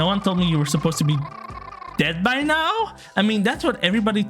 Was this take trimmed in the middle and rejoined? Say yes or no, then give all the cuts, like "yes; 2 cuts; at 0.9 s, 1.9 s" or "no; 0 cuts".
no; 0 cuts